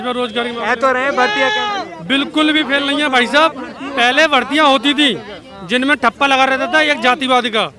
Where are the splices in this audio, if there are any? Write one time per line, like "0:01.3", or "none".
none